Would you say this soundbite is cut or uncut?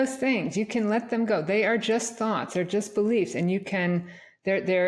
uncut